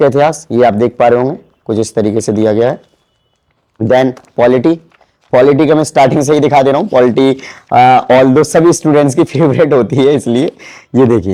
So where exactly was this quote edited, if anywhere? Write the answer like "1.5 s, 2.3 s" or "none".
none

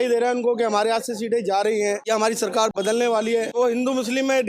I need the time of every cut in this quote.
2.0 s, 3.5 s

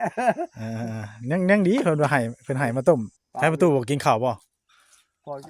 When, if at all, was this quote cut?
3.2 s

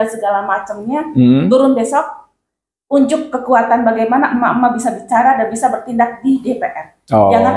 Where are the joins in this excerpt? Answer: none

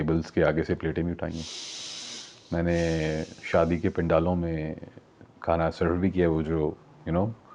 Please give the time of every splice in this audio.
none

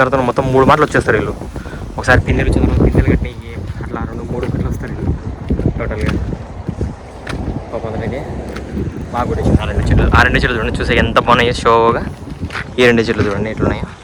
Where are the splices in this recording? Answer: none

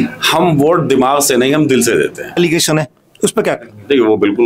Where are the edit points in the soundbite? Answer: 2.4 s

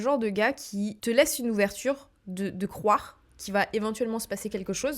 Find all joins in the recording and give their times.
1.0 s

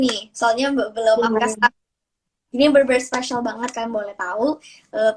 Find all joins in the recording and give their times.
none

